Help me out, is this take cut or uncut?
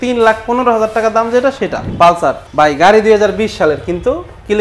cut